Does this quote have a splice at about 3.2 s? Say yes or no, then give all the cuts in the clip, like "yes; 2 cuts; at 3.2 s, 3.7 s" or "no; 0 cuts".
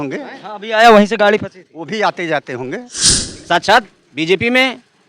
yes; 1 cut; at 3.2 s